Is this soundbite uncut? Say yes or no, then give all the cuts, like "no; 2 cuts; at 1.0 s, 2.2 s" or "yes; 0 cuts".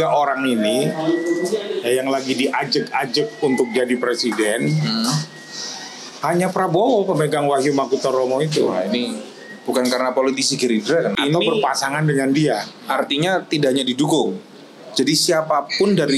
no; 1 cut; at 11.1 s